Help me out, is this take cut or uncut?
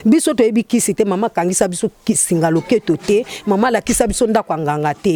uncut